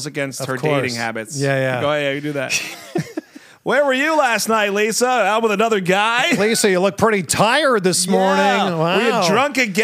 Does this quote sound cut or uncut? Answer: uncut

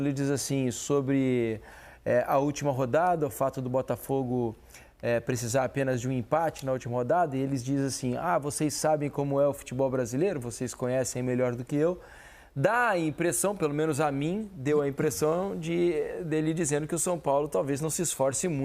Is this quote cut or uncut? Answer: uncut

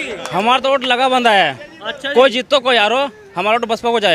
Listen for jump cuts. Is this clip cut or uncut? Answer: uncut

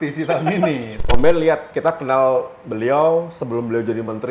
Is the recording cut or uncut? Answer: cut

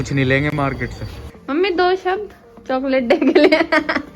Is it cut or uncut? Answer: cut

